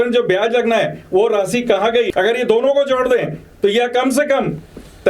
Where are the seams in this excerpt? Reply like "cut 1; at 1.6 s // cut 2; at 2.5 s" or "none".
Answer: cut 1; at 2.1 s